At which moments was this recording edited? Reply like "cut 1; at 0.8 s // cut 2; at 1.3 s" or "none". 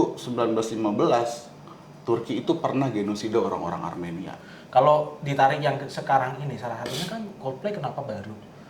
cut 1; at 4.3 s